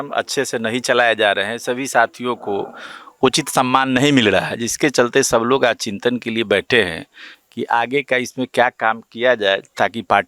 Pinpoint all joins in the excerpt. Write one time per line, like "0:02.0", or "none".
none